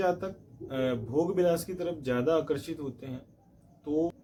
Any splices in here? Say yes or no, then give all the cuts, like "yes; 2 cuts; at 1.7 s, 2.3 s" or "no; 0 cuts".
no; 0 cuts